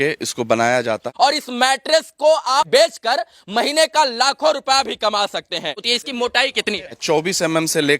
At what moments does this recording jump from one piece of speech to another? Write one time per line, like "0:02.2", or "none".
0:01.1
0:02.7
0:05.9
0:06.9